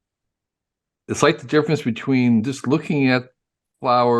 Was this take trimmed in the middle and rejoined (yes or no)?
yes